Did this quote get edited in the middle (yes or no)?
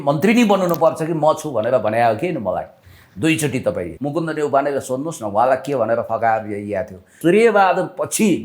yes